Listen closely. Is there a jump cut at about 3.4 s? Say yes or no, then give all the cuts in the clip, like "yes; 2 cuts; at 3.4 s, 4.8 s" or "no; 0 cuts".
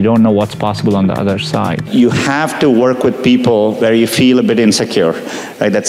no; 1 cut; at 1.8 s